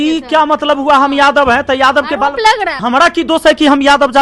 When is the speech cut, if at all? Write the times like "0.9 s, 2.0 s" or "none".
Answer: 2.8 s

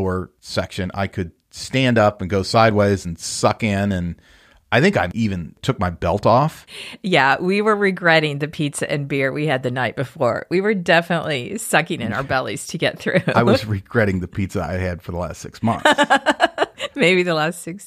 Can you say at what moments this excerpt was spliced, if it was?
none

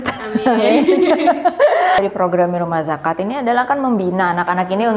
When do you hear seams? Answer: 2.0 s

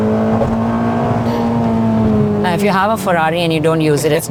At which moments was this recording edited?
none

